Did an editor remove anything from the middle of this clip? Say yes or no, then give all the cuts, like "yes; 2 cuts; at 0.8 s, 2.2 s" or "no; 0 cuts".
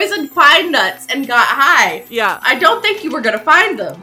no; 0 cuts